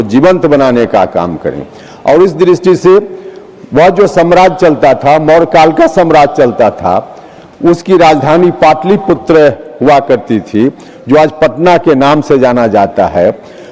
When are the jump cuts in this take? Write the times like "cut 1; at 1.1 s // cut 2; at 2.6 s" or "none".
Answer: none